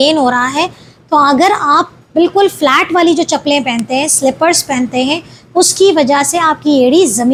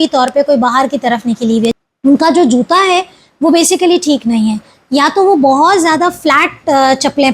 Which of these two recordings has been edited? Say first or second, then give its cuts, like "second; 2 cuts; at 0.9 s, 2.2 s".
second; 1 cut; at 1.7 s